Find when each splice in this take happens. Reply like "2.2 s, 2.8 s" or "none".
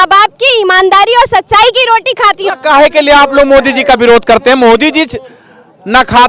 none